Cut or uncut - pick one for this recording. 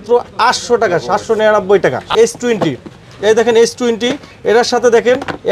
cut